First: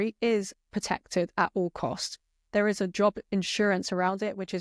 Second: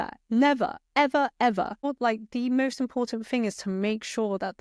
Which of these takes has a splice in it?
second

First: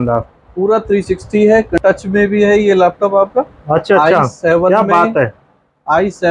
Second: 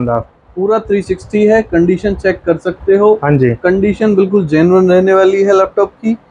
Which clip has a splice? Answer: first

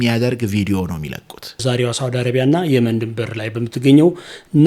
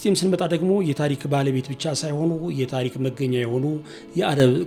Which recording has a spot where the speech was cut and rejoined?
first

